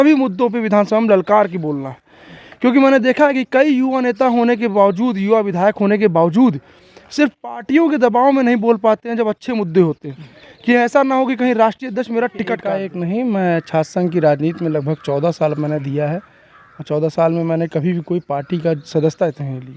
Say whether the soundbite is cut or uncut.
cut